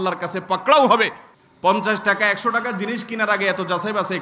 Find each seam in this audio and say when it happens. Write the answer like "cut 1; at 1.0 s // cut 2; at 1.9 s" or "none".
cut 1; at 1.3 s